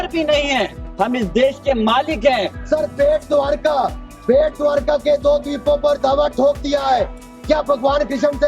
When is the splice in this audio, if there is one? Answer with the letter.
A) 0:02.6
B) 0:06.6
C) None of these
A